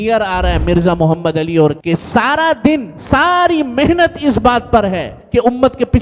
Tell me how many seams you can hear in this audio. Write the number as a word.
two